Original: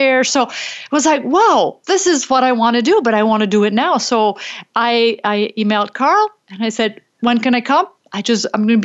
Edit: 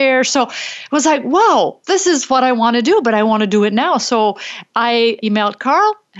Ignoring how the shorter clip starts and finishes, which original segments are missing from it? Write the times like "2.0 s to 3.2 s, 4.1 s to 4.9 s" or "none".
5.2 s to 5.5 s